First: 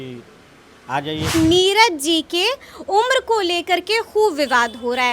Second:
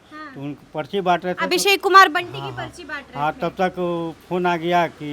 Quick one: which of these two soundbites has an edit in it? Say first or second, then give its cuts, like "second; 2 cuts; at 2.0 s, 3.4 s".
first; 1 cut; at 1.3 s